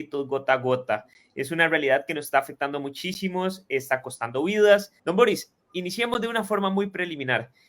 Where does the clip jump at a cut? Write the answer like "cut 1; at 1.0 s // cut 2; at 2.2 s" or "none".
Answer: cut 1; at 4.9 s